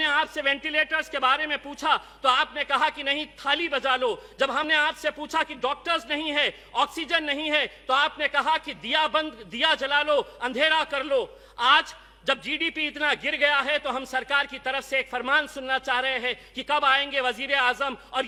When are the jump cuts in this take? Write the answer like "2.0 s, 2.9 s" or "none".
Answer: none